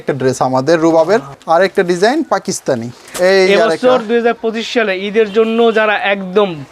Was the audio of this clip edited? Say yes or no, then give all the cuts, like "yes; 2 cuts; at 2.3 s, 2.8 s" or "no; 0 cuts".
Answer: yes; 2 cuts; at 1.3 s, 3.0 s